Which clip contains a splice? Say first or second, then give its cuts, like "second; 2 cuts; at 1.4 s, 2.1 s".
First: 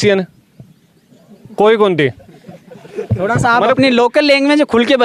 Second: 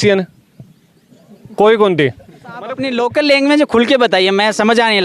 second; 1 cut; at 2.8 s